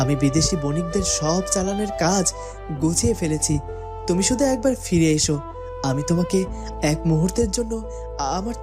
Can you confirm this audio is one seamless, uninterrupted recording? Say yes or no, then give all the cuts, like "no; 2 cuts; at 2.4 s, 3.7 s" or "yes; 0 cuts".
yes; 0 cuts